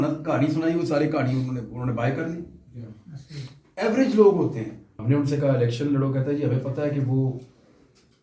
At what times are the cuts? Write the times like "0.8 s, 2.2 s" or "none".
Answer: 4.9 s